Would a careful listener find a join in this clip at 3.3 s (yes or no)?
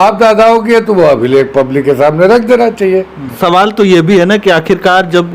yes